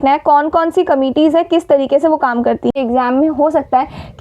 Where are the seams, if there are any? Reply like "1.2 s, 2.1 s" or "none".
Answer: 2.7 s